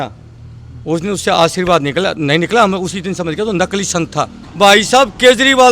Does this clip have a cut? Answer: yes; 1 cut; at 4.4 s

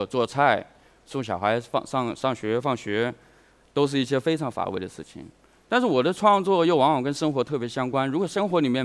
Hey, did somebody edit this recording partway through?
yes; 1 cut; at 0.9 s

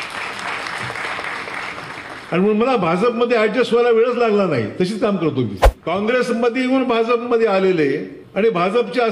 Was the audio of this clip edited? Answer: yes; 2 cuts; at 5.7 s, 8.2 s

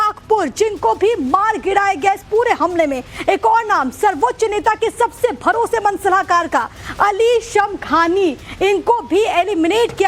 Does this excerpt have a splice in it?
no; 0 cuts

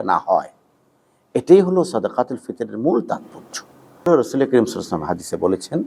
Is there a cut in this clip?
yes; 1 cut; at 4.1 s

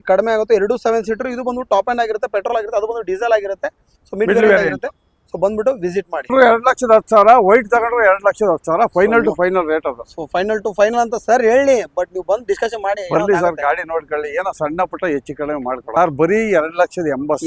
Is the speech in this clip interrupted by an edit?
yes; 2 cuts; at 6.3 s, 15.8 s

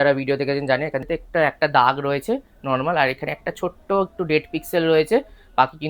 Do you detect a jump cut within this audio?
yes; 1 cut; at 1.0 s

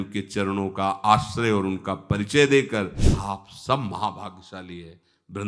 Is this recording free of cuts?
no; 1 cut; at 3.1 s

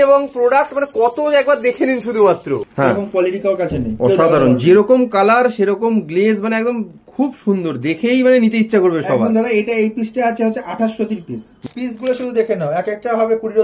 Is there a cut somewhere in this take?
yes; 2 cuts; at 2.7 s, 11.6 s

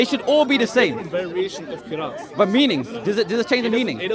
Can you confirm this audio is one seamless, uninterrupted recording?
yes; 0 cuts

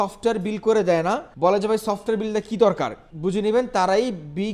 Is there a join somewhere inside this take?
yes; 2 cuts; at 1.3 s, 3.0 s

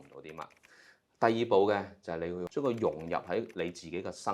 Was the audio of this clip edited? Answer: yes; 1 cut; at 2.5 s

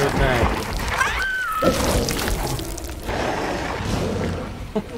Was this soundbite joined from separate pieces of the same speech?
yes; 1 cut; at 3.1 s

